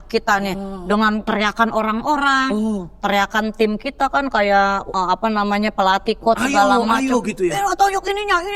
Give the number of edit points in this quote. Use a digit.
2